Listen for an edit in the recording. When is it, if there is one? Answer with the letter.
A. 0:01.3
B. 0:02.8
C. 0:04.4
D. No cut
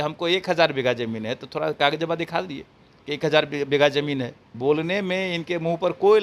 C